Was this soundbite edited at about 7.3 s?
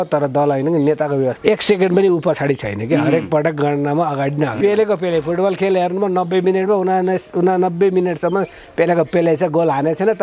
no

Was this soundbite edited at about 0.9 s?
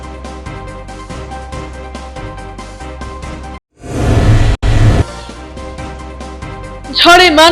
no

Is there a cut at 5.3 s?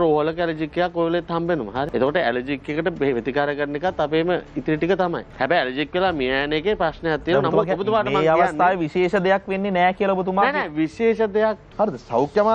yes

